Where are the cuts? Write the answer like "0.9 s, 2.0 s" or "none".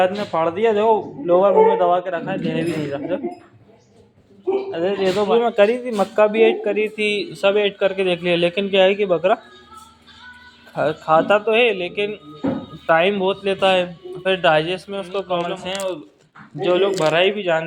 5.3 s, 15.5 s